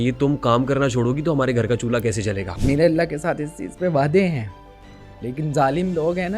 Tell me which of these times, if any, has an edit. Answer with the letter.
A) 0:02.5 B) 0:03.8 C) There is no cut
A